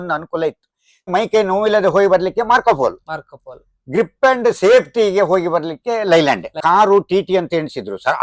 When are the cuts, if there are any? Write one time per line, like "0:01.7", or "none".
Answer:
0:01.1
0:06.6